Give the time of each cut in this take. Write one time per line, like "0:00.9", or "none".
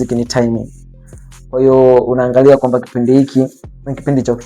none

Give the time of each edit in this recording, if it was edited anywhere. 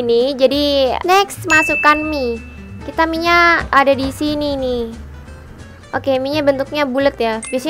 0:01.0

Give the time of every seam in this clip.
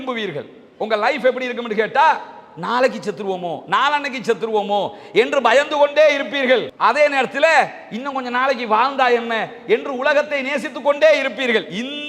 none

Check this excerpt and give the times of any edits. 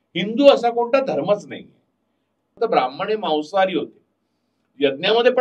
0:02.5

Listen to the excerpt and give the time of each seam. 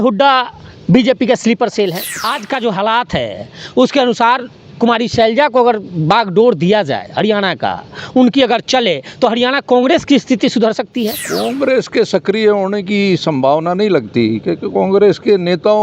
0:02.3
0:11.2

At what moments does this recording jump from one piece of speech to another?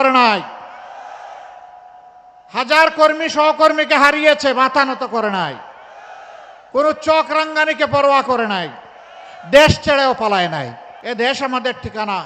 0:10.9

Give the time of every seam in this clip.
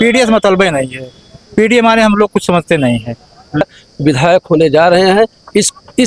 0:03.6

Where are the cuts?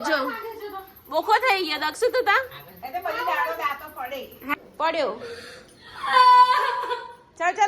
0:04.4

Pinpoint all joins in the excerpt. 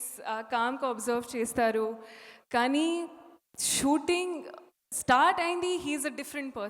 none

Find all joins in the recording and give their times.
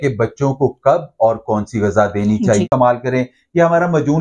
0:02.6

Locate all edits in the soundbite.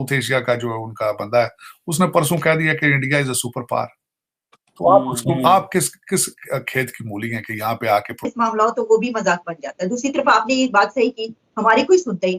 0:08.1

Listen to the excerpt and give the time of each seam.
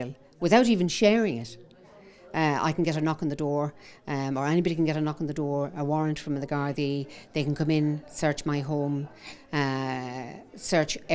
none

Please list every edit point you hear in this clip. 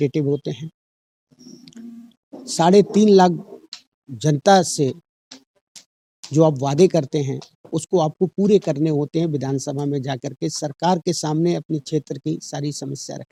none

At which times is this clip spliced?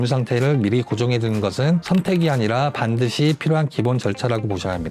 none

